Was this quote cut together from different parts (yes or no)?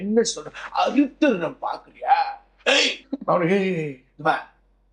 yes